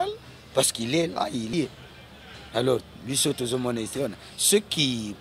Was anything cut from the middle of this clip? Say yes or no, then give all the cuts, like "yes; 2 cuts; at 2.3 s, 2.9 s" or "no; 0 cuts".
yes; 1 cut; at 1.5 s